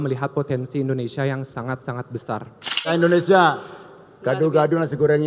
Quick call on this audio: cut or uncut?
cut